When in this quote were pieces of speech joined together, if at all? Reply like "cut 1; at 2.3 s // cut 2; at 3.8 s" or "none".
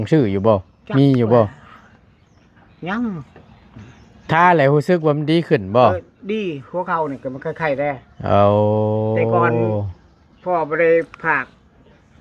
none